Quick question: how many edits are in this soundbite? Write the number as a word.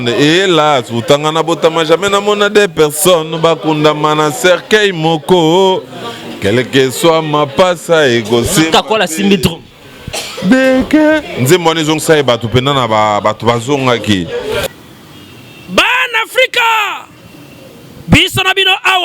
one